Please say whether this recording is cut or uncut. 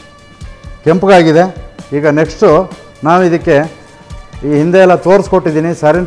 uncut